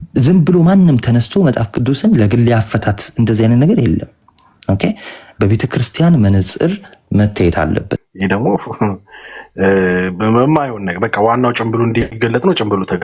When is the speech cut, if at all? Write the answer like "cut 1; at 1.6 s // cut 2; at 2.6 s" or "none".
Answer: cut 1; at 8.0 s